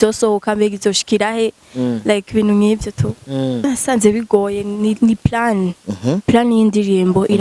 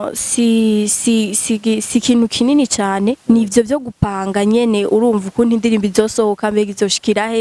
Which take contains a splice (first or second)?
first